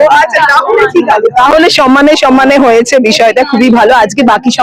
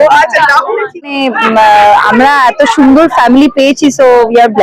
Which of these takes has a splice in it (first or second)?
second